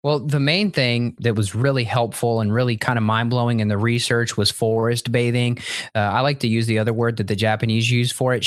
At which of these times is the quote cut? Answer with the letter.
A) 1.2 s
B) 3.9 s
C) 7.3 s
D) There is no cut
A